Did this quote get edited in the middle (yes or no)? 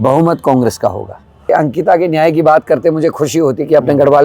yes